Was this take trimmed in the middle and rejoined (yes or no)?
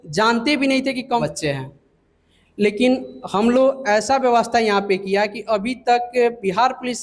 yes